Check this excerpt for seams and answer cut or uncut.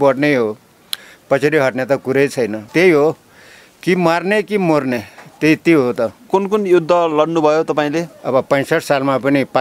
cut